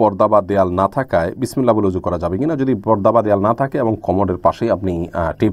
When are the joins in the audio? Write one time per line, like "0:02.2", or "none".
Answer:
none